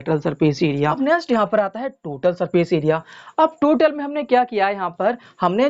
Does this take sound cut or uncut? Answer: cut